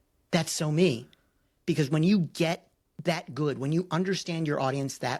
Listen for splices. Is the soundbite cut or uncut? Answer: uncut